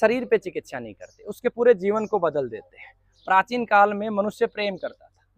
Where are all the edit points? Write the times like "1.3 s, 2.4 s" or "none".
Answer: none